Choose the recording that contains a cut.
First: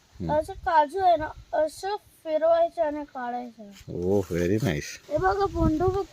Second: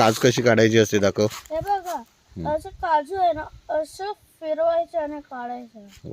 first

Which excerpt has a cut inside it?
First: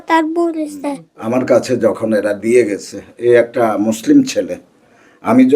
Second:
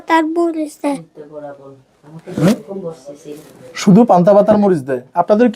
first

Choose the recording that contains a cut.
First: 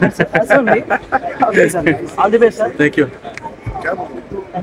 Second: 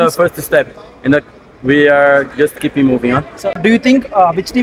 second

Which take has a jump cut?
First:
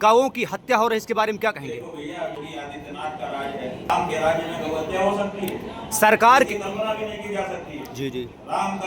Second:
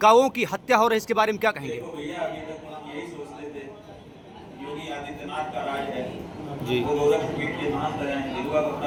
first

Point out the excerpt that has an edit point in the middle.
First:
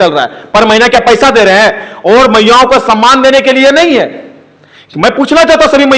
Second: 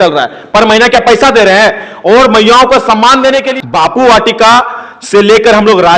second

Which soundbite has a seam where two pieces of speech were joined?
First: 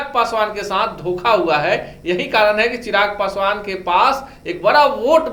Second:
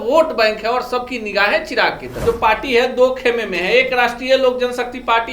second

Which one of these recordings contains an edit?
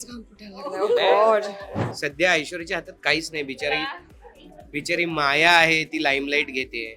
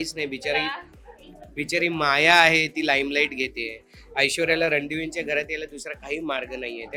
first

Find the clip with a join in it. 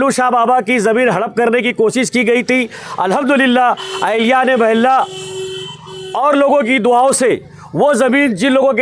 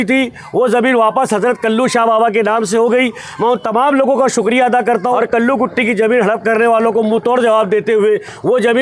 second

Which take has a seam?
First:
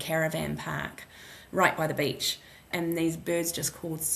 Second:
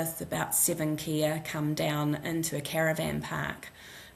first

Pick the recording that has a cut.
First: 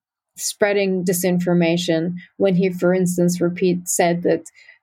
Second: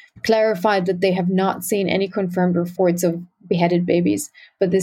second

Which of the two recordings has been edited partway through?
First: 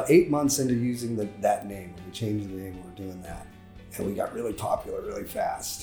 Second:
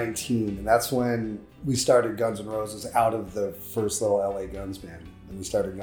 second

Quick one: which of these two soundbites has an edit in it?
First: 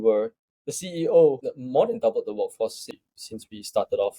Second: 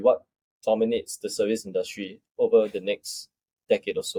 first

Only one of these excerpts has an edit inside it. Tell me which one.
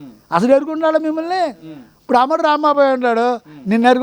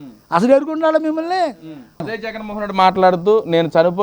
second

